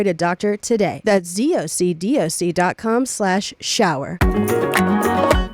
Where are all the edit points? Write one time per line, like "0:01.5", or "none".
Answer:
0:01.0
0:04.1